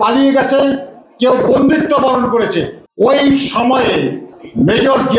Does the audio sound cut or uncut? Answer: cut